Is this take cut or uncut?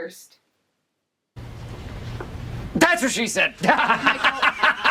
uncut